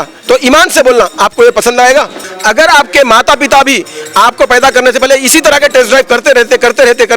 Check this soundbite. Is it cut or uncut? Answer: cut